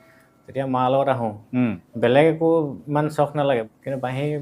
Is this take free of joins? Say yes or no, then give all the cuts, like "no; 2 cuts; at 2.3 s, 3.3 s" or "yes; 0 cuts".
no; 2 cuts; at 1.8 s, 3.7 s